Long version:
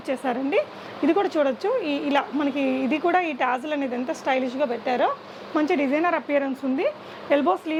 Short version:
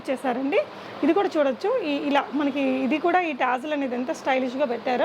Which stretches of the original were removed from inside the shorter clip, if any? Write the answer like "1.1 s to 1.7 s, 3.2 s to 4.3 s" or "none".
none